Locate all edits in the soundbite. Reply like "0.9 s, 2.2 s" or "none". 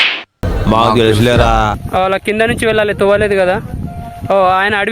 1.8 s